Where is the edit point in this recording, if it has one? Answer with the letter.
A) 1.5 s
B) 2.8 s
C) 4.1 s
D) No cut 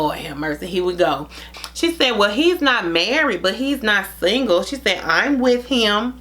A